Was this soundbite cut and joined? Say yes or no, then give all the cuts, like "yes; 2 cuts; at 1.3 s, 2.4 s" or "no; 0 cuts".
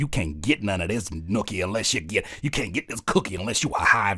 no; 0 cuts